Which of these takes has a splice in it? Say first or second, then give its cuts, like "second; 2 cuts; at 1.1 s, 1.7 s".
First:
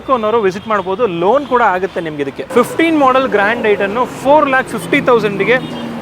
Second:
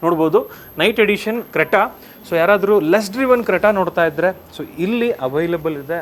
first; 1 cut; at 2.4 s